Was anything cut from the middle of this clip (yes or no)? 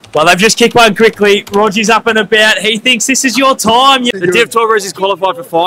yes